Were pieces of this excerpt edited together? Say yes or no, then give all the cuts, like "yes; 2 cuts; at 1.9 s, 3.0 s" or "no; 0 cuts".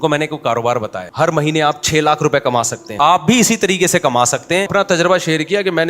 yes; 3 cuts; at 1.0 s, 2.8 s, 4.7 s